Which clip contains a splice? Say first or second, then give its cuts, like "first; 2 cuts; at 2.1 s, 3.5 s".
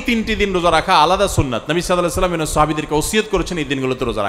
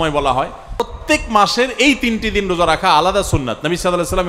second; 1 cut; at 1.0 s